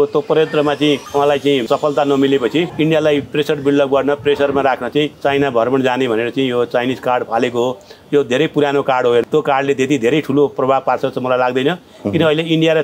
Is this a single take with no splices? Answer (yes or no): no